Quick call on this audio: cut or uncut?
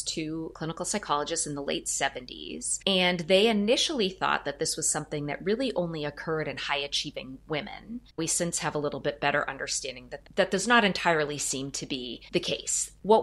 cut